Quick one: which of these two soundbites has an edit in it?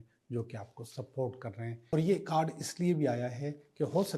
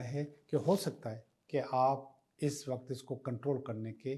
first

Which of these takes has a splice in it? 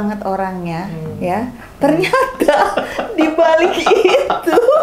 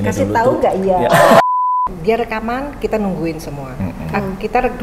second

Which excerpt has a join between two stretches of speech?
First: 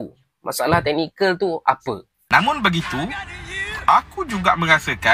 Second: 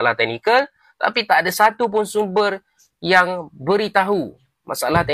first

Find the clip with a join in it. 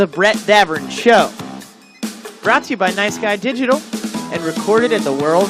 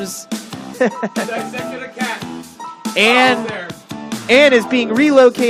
first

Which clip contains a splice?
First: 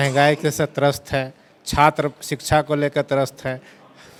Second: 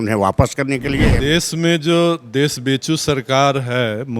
second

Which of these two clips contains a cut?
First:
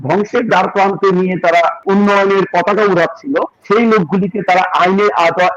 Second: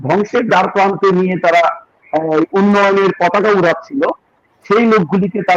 first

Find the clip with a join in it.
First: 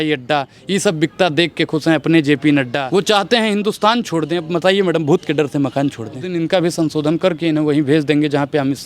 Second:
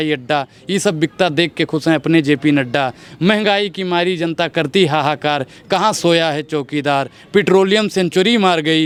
first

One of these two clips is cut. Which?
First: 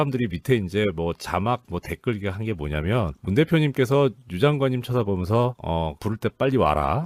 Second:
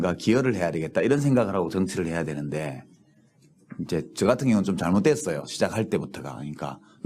second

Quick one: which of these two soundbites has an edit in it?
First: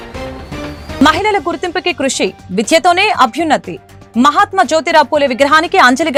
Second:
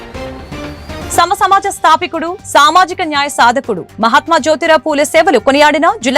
second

